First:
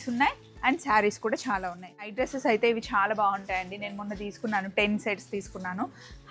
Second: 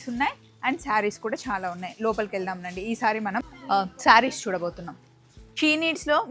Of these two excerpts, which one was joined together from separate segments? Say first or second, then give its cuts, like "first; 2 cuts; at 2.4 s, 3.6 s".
first; 1 cut; at 2.0 s